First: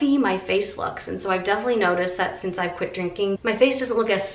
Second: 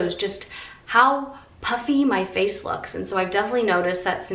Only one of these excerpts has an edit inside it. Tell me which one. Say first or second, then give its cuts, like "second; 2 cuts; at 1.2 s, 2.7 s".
first; 1 cut; at 3.4 s